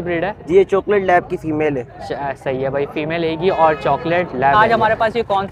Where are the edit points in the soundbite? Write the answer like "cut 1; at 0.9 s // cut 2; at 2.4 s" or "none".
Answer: cut 1; at 4.5 s